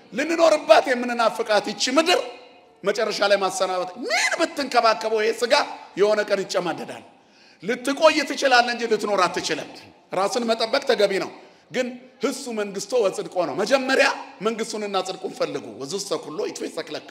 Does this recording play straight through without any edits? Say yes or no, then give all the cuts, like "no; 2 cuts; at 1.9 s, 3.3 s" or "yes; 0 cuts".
yes; 0 cuts